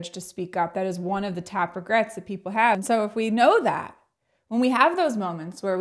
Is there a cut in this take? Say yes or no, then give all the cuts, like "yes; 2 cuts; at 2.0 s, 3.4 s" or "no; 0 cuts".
yes; 1 cut; at 2.8 s